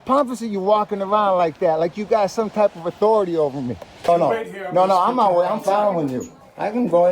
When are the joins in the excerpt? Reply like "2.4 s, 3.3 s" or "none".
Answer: 4.0 s

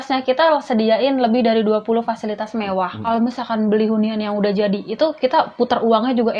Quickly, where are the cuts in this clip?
3.0 s

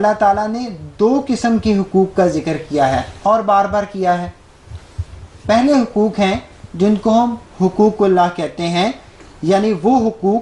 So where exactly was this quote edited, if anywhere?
none

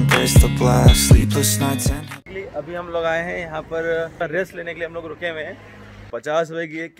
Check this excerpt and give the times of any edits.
2.1 s, 4.2 s, 6.1 s

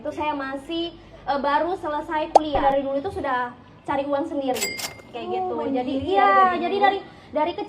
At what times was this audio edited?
2.6 s

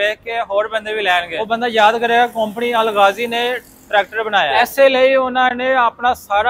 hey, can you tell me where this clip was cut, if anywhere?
1.3 s, 4.5 s

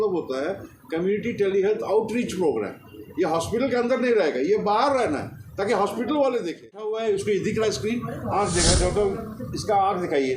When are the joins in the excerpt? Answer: 6.9 s

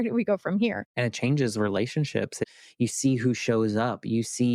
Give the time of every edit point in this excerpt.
0.9 s, 2.5 s

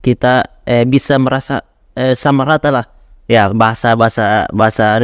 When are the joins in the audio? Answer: none

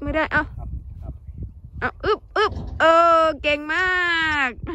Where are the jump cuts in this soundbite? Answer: none

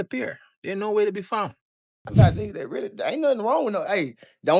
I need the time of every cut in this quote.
none

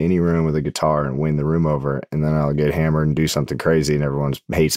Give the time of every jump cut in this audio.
none

